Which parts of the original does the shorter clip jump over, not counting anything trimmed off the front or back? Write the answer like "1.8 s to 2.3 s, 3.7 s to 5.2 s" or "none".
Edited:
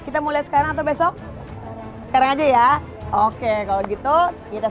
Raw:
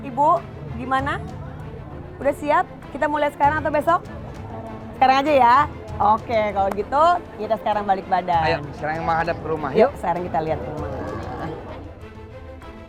none

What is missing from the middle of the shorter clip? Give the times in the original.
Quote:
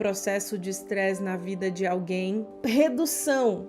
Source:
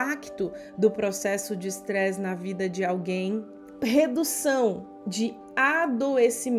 3.5 s to 3.7 s

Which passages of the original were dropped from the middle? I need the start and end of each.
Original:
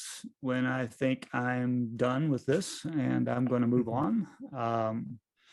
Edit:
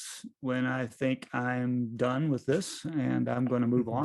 none

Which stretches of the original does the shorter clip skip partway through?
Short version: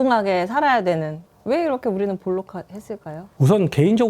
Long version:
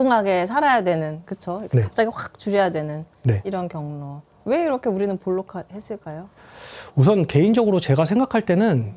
1.2 s to 4.3 s, 6.2 s to 6.7 s

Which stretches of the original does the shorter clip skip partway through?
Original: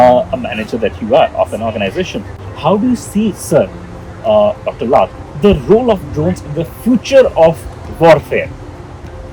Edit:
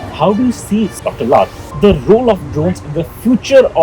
3.4 s to 4.6 s

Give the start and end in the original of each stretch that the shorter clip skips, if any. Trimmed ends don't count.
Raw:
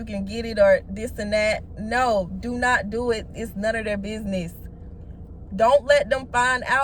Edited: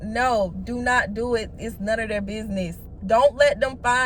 4.6 s to 5.4 s

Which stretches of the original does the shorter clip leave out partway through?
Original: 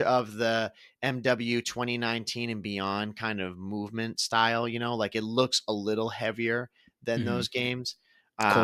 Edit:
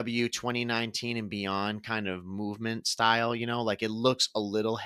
none

